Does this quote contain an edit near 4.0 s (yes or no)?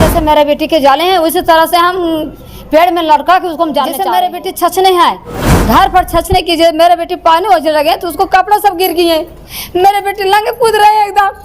yes